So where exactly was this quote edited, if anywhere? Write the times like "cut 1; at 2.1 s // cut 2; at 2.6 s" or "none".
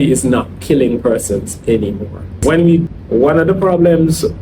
cut 1; at 2.9 s

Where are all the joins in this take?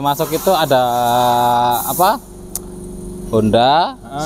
none

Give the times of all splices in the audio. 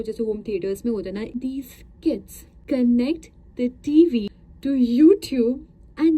cut 1; at 1.4 s // cut 2; at 2.6 s // cut 3; at 4.4 s

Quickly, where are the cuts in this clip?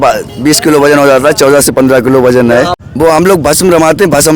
cut 1; at 2.7 s

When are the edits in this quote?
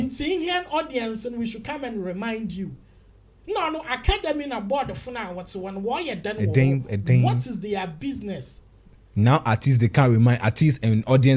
none

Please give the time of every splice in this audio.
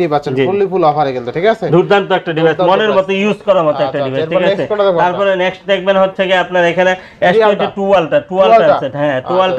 none

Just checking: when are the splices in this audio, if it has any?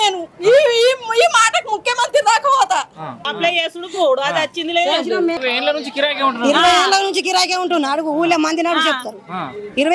cut 1; at 3.2 s // cut 2; at 5.4 s

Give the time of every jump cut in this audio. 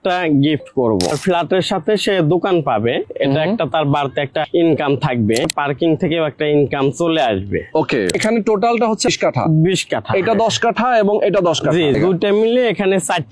cut 1; at 1.2 s // cut 2; at 4.5 s // cut 3; at 5.4 s // cut 4; at 8.1 s // cut 5; at 9.1 s // cut 6; at 12.0 s

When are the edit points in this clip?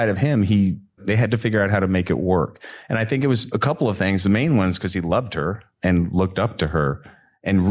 cut 1; at 1.0 s // cut 2; at 3.4 s

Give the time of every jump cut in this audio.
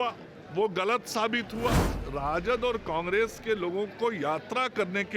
cut 1; at 2.0 s

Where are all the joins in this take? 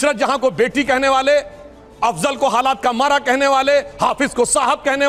none

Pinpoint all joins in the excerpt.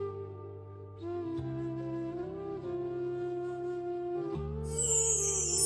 cut 1; at 1.7 s

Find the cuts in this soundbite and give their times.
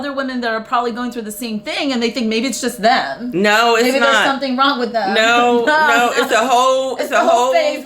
none

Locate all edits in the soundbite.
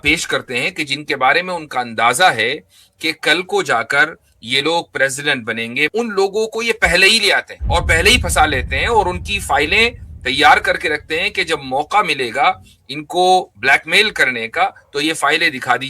cut 1; at 5.9 s // cut 2; at 7.5 s

